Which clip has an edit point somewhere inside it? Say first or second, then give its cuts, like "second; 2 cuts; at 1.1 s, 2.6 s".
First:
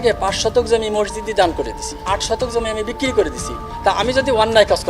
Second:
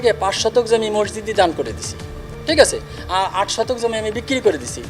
first; 2 cuts; at 2.0 s, 3.6 s